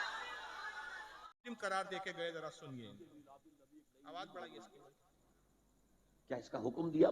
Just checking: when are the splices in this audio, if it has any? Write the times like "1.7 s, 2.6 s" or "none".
1.4 s